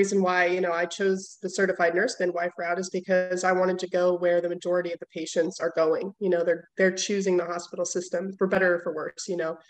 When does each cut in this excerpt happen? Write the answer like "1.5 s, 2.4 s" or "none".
8.6 s